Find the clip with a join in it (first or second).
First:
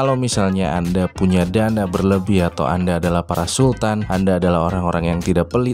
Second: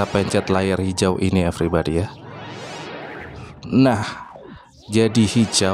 first